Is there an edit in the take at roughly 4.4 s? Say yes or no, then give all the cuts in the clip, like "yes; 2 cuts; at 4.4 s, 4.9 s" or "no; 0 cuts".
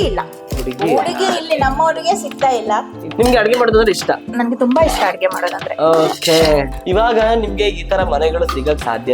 no; 2 cuts; at 3.1 s, 6.7 s